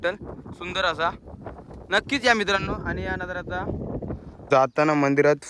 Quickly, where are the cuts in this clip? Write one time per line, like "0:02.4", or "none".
0:04.4